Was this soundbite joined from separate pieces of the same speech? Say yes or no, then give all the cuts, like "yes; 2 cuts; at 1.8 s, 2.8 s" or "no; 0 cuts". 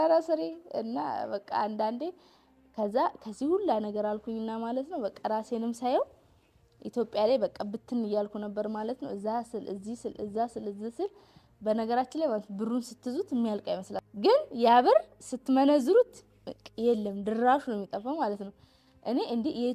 yes; 1 cut; at 14.0 s